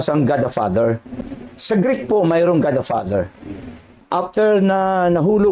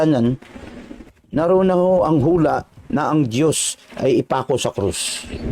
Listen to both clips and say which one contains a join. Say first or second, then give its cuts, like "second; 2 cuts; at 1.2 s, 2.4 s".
first; 2 cuts; at 1.3 s, 4.0 s